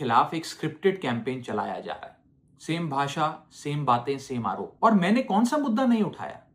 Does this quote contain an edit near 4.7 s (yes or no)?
yes